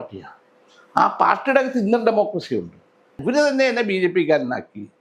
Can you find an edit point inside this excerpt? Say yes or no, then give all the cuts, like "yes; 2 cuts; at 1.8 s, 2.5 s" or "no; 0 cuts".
yes; 1 cut; at 3.2 s